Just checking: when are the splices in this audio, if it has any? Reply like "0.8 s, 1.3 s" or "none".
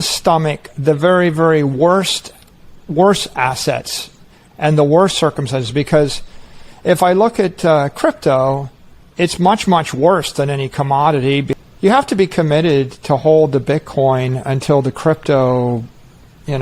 11.5 s

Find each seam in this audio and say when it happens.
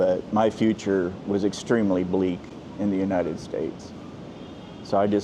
none

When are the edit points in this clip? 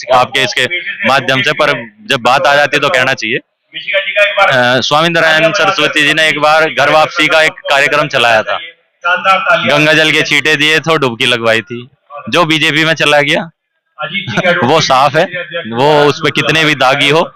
none

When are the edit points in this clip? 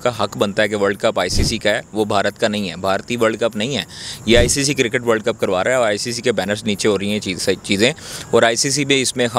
none

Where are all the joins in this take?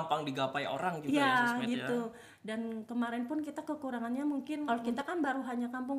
4.6 s

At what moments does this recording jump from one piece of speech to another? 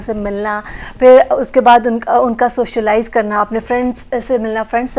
none

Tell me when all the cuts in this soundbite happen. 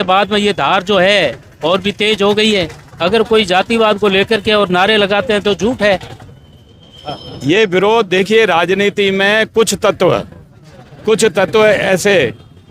6.2 s

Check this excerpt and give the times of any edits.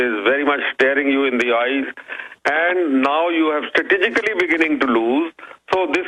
none

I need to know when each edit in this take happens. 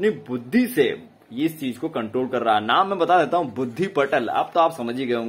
none

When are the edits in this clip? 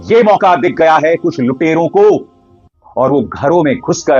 none

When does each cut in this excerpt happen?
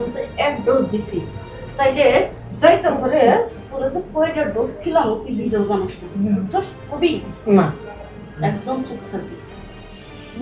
none

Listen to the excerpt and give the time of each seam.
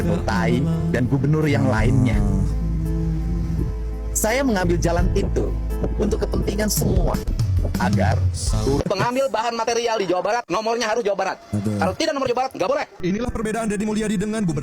8.8 s, 12.9 s

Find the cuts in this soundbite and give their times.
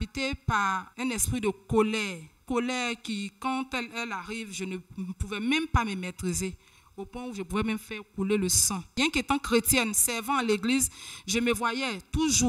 0.9 s, 2.5 s, 8.9 s

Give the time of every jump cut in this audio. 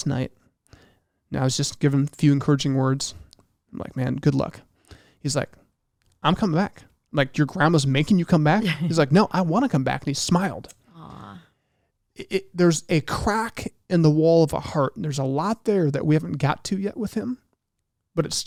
none

